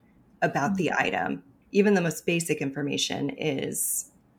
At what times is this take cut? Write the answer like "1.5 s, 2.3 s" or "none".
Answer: 1.5 s